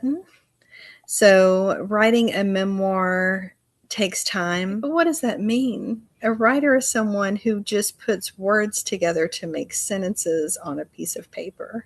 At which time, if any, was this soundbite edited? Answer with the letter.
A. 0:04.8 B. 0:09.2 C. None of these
A